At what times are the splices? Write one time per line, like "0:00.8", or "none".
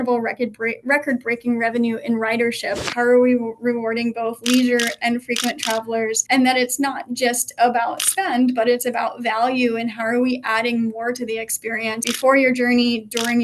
0:02.9
0:06.2
0:12.1